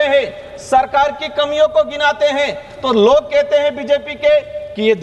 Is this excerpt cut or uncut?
uncut